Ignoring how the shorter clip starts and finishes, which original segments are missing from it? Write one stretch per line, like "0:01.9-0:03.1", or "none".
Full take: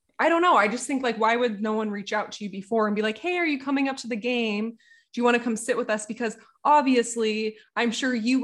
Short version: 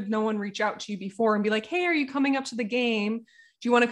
none